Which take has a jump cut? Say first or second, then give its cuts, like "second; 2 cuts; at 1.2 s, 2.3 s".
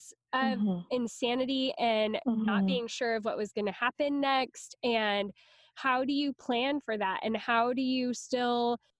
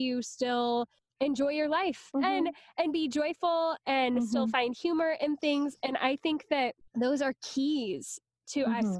second; 1 cut; at 2.1 s